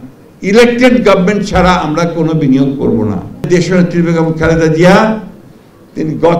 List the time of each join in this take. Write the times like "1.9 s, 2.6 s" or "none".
3.5 s